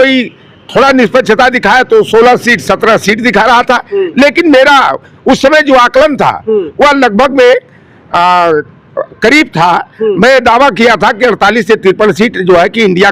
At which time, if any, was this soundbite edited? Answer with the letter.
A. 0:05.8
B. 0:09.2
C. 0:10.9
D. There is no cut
D